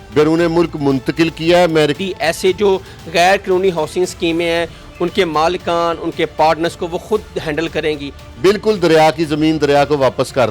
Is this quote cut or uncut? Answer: cut